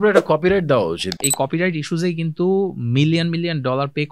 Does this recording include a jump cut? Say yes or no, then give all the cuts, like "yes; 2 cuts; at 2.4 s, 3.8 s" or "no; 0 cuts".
yes; 1 cut; at 1.2 s